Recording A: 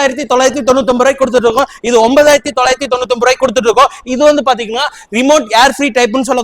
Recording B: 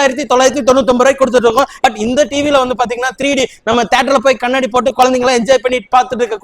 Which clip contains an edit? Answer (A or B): B